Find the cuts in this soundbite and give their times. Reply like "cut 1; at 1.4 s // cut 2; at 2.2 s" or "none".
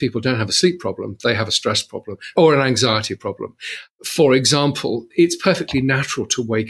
cut 1; at 2.3 s // cut 2; at 5.0 s